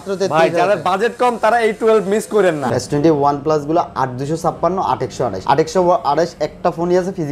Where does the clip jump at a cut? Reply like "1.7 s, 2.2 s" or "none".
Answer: 2.7 s, 5.4 s